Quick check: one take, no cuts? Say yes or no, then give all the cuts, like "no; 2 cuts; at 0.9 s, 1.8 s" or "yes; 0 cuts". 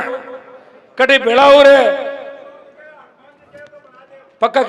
yes; 0 cuts